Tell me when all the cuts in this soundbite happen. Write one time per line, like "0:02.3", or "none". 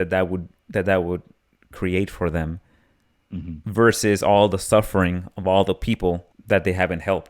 0:06.3